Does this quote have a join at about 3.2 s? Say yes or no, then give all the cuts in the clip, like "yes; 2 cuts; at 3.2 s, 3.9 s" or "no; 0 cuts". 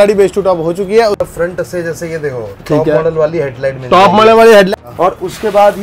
no; 2 cuts; at 1.2 s, 4.7 s